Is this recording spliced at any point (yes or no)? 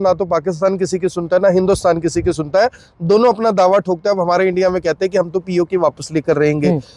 no